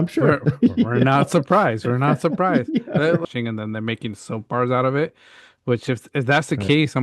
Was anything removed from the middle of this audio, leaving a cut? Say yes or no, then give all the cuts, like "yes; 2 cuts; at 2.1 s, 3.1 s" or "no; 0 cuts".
yes; 1 cut; at 3.2 s